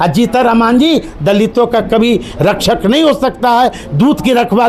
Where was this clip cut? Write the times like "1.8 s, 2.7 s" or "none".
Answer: none